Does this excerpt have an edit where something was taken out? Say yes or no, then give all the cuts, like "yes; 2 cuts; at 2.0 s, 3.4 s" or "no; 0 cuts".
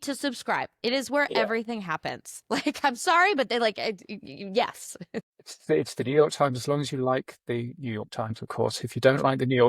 no; 0 cuts